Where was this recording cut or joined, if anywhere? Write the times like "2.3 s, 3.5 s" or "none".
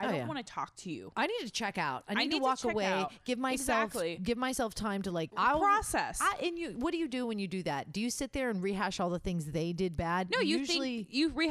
5.3 s